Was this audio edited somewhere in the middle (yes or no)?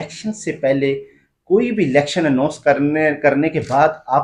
no